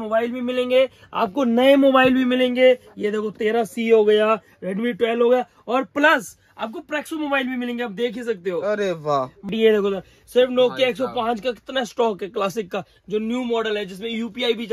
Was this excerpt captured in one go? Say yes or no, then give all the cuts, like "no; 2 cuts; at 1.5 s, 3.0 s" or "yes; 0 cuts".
no; 1 cut; at 9.5 s